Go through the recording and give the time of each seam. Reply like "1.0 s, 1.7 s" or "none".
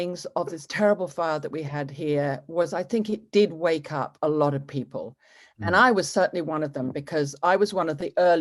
none